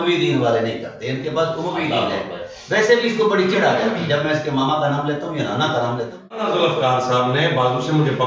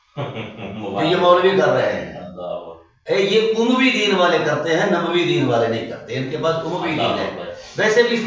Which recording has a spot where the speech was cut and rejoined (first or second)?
first